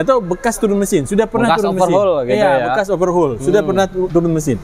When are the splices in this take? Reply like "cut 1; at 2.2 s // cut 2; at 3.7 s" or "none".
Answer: none